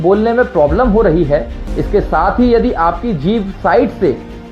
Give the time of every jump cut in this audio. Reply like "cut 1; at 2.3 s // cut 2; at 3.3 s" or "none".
cut 1; at 1.6 s